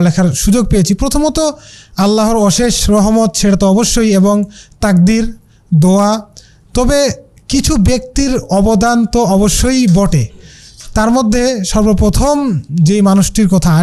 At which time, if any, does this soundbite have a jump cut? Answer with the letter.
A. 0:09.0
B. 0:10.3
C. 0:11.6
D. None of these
D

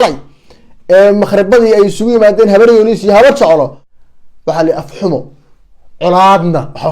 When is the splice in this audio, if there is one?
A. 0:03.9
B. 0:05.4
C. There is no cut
A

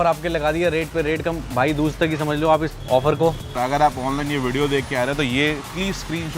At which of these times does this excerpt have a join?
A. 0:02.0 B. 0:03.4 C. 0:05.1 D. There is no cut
B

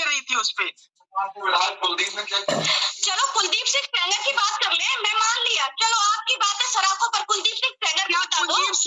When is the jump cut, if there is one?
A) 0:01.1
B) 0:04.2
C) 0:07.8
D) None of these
D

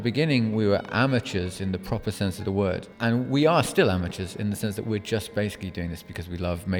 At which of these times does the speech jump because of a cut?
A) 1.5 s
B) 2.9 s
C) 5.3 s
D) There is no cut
B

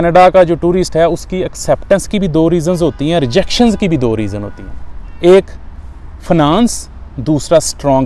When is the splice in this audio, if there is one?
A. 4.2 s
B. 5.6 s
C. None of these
C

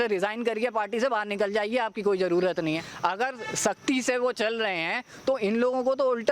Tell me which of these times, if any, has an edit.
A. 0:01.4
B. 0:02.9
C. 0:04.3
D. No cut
B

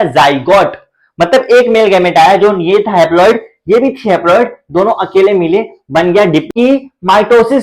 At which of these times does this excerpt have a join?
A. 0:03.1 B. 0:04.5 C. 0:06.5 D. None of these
C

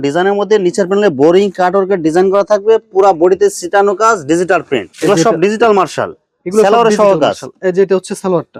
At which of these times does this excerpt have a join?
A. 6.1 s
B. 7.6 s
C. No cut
C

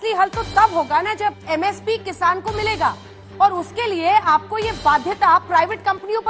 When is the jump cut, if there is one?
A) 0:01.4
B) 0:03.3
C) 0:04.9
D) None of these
A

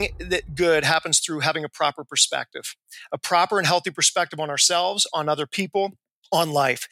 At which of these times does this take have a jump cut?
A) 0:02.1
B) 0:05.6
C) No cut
C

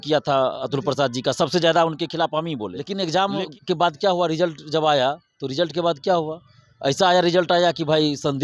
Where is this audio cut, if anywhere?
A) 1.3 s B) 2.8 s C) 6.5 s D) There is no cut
B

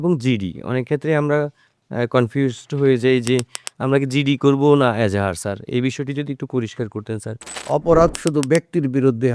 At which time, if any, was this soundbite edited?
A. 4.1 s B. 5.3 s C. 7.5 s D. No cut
C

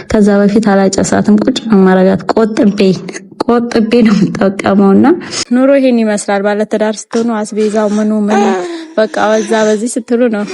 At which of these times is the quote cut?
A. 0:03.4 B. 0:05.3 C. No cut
B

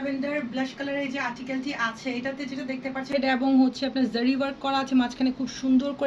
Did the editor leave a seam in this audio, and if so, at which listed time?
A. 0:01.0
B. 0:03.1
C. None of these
B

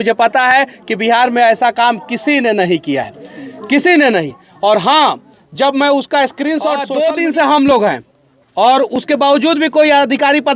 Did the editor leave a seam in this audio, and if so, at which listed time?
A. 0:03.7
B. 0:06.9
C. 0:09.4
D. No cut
B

